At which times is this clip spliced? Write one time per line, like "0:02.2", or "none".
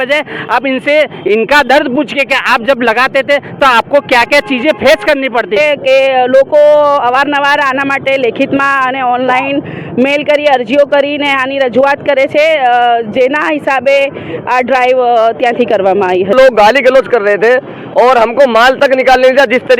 0:05.6
0:16.3

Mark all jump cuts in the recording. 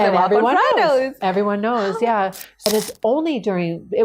0:02.7

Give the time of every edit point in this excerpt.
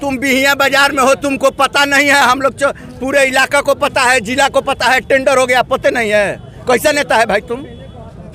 none

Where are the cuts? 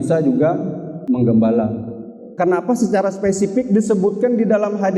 0:02.3

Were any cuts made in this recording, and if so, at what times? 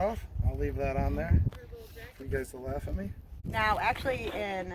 0:03.3

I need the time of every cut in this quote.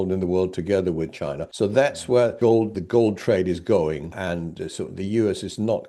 0:01.4
0:02.5
0:04.3

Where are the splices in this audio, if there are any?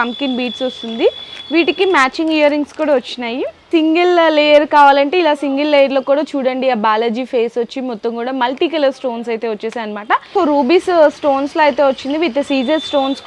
0:03.6
0:10.3

